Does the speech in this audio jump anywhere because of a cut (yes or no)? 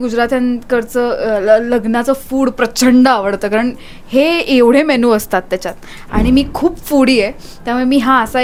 no